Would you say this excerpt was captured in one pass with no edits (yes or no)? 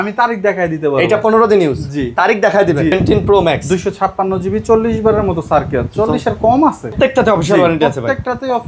no